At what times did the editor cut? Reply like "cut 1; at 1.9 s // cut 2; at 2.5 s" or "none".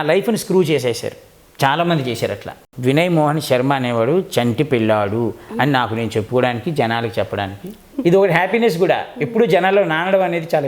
cut 1; at 2.7 s // cut 2; at 7.9 s